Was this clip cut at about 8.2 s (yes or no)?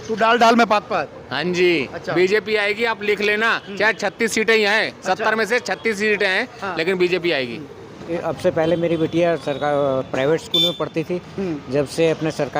yes